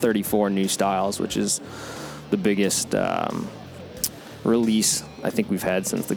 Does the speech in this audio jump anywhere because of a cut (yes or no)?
no